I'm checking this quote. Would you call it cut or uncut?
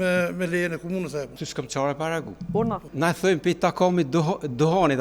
cut